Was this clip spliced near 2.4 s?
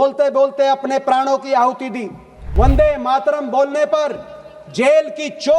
yes; 1 cut; at 2.4 s

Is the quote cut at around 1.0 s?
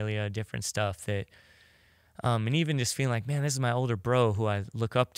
no; 0 cuts

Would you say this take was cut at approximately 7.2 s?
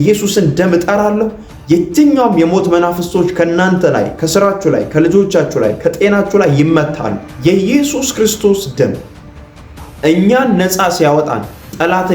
yes; 1 cut; at 7.2 s

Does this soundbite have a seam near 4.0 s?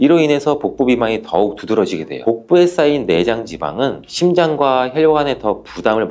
no; 1 cut; at 2.2 s

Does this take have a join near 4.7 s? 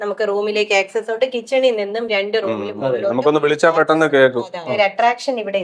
yes; 1 cut; at 4.7 s

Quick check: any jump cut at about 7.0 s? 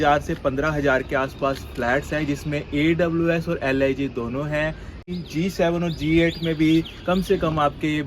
no; 1 cut; at 5.1 s

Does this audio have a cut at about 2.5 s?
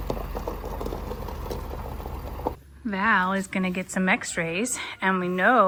no; 0 cuts

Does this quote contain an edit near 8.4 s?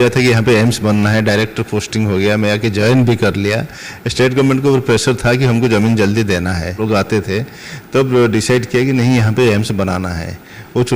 no; 1 cut; at 6.8 s

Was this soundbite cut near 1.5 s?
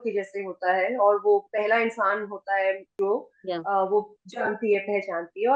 no; 1 cut; at 2.9 s

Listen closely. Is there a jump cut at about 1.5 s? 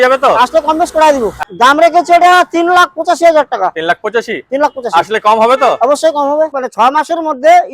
yes; 2 cuts; at 1.5 s, 6.6 s

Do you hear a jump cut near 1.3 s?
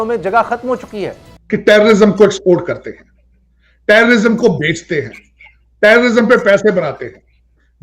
yes; 1 cut; at 1.3 s

